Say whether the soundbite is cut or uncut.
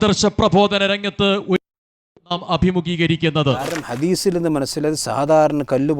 cut